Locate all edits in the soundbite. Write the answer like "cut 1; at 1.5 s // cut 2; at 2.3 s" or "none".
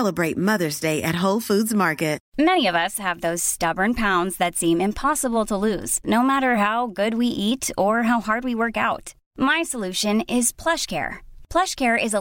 cut 1; at 2.2 s